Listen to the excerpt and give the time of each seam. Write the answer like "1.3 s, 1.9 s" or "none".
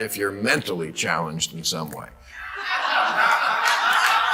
none